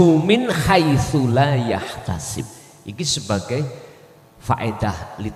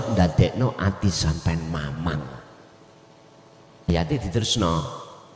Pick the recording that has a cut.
second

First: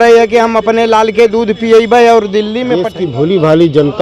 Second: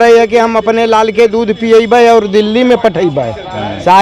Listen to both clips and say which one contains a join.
first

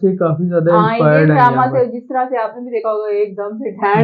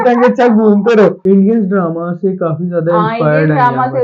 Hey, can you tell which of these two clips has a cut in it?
second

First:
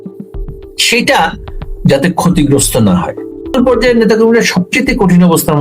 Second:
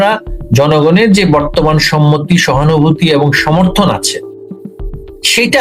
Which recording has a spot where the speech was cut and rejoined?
first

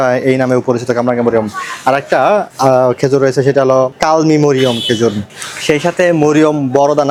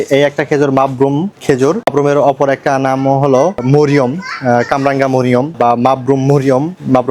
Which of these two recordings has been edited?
second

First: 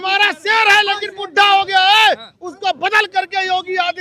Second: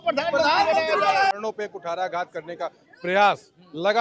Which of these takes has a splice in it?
second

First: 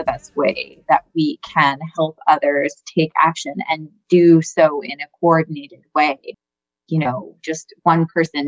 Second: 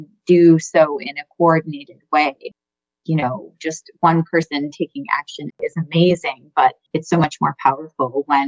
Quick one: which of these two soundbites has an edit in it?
second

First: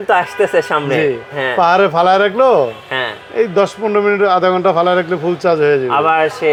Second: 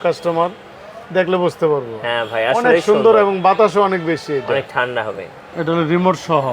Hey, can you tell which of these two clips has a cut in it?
second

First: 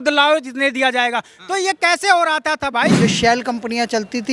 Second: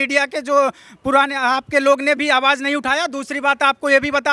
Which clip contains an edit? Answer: first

